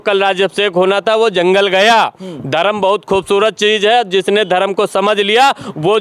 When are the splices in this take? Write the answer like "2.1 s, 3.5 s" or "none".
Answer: none